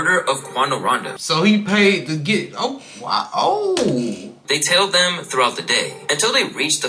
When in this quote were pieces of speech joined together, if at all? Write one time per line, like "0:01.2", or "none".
0:01.1
0:04.4

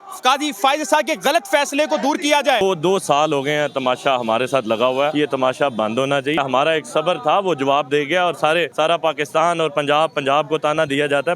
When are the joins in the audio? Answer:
0:02.6
0:05.1
0:06.4
0:08.7

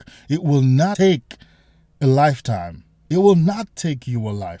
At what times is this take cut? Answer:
0:01.0

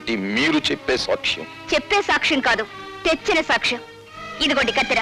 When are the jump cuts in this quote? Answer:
none

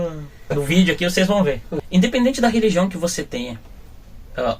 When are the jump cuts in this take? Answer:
0:01.7

